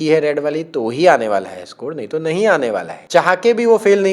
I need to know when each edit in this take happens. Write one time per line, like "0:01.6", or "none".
0:02.9